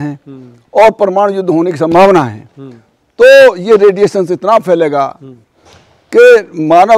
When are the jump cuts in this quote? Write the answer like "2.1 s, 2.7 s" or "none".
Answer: none